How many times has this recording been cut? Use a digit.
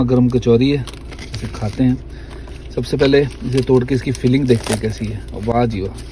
0